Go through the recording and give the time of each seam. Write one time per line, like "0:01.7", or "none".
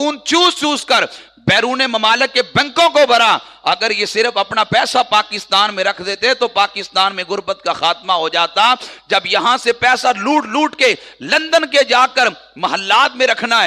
none